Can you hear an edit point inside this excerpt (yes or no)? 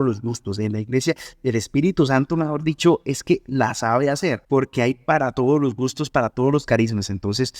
yes